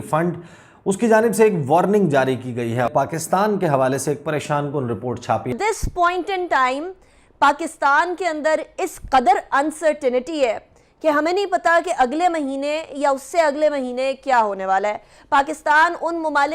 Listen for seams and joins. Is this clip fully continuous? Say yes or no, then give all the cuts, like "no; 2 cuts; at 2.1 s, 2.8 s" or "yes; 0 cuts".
no; 2 cuts; at 2.9 s, 5.5 s